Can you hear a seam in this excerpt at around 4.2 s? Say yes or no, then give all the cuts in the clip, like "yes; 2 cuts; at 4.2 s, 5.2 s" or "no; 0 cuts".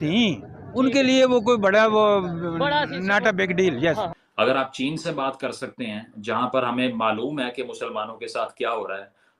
yes; 1 cut; at 4.2 s